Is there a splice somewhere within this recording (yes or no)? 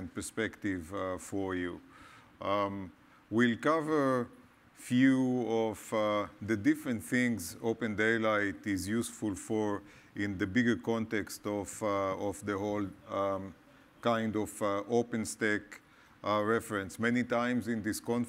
no